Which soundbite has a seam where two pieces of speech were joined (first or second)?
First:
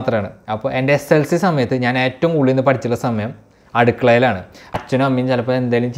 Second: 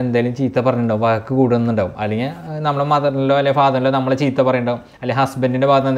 first